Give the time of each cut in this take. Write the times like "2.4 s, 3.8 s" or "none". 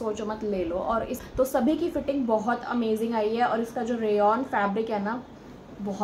1.2 s